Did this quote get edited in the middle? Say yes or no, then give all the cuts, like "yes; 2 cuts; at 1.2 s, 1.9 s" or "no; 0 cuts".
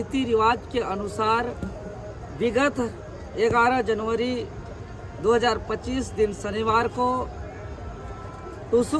no; 0 cuts